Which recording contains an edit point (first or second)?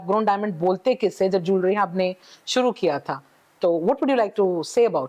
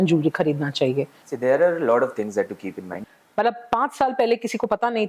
second